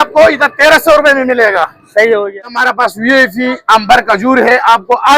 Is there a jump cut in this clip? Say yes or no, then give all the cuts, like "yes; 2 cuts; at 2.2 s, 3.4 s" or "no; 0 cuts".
yes; 1 cut; at 2.4 s